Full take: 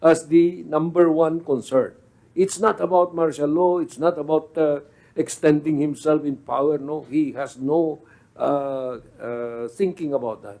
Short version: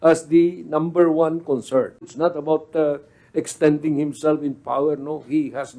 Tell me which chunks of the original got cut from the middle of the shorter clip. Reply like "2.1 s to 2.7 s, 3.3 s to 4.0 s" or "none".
2.1 s to 3.9 s